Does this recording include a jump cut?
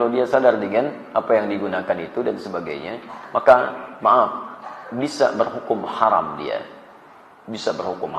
no; 0 cuts

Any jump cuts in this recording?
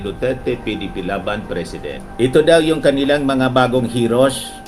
yes; 1 cut; at 2.0 s

